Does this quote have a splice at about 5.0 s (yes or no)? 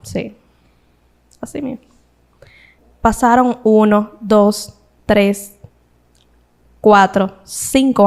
no